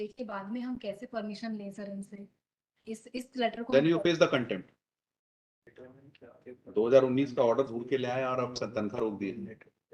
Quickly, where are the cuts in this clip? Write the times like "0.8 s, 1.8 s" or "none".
5.6 s

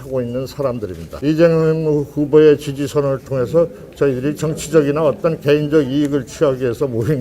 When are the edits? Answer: 1.0 s

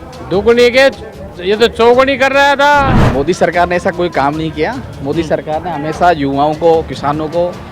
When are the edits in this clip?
3.0 s

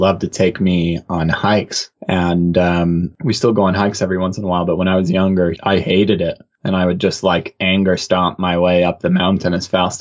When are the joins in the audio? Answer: none

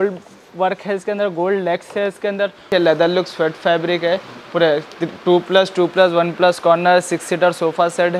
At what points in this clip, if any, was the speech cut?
2.7 s

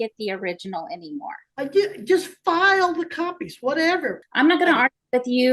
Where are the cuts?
4.2 s

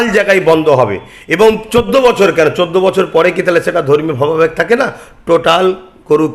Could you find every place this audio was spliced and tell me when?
none

